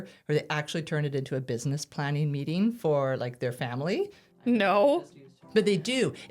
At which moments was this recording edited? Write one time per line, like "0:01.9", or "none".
0:05.3